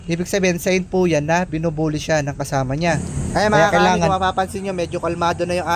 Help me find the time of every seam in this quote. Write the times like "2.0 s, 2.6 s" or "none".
3.2 s